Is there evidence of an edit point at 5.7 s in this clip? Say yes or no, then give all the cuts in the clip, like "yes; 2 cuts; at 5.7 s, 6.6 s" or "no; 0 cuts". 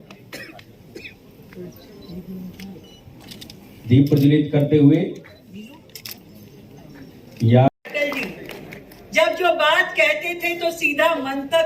no; 1 cut; at 7.7 s